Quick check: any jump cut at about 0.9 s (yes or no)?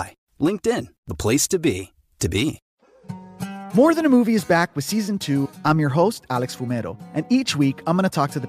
no